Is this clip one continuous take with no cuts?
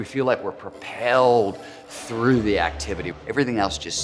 yes; 0 cuts

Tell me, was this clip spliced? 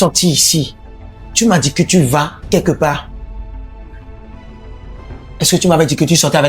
no; 0 cuts

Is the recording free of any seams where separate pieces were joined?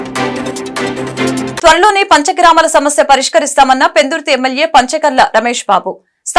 yes; 0 cuts

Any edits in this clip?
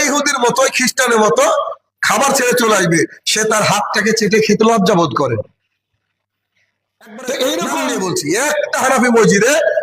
yes; 1 cut; at 7.9 s

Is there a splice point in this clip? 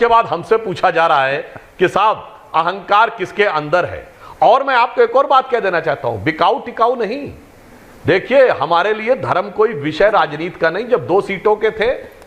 no; 0 cuts

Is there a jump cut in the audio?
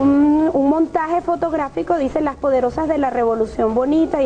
yes; 1 cut; at 2.6 s

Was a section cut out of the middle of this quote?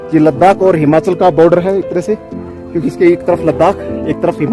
no; 0 cuts

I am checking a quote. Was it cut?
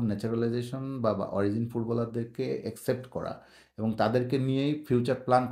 no; 0 cuts

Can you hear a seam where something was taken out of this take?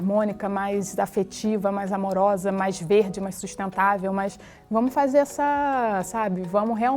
no; 0 cuts

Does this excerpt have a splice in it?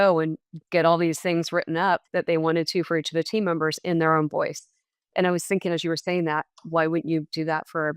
yes; 1 cut; at 2.1 s

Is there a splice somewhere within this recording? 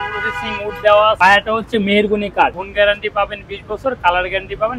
yes; 2 cuts; at 1.2 s, 2.6 s

